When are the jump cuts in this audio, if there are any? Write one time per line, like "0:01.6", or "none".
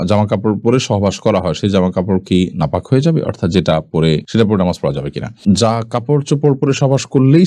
none